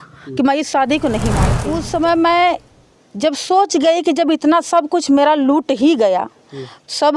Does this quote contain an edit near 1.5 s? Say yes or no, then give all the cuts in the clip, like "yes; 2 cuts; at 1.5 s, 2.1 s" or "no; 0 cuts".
yes; 1 cut; at 1.5 s